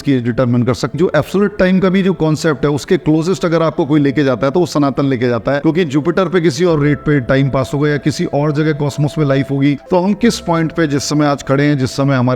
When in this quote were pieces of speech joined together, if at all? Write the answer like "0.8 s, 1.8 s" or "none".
0.9 s, 5.6 s, 9.8 s